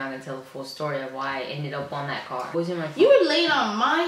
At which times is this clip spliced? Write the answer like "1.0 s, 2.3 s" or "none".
2.5 s